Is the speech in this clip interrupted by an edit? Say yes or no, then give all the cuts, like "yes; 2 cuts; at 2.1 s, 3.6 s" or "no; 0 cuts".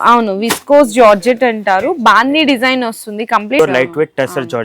yes; 1 cut; at 3.6 s